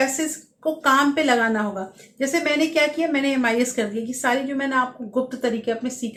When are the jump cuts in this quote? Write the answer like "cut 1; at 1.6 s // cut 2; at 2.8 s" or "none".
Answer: none